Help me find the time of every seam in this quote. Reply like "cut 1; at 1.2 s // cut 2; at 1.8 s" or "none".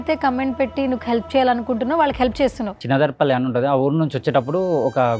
cut 1; at 2.8 s